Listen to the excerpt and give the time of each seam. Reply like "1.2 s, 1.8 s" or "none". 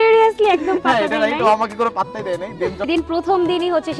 2.8 s